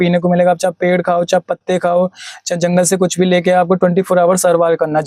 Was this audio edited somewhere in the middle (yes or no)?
no